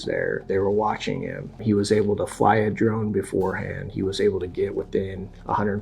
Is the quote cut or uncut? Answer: cut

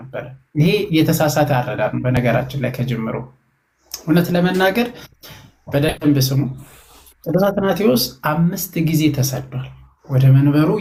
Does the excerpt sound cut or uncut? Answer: uncut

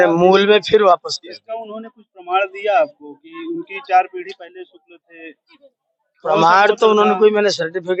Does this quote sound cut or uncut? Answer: uncut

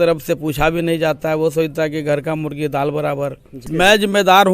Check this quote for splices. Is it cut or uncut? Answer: cut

